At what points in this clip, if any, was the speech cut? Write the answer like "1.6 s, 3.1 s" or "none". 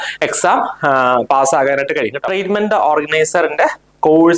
2.2 s